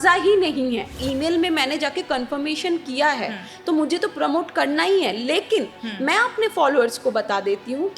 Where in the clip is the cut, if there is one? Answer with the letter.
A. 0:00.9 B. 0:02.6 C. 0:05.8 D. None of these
A